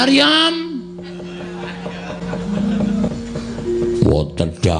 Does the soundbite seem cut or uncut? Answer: cut